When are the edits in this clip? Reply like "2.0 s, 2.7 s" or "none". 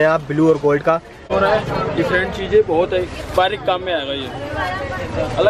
1.2 s